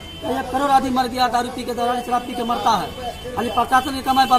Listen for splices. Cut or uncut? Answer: uncut